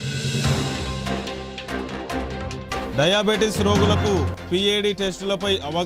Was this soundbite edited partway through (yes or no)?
no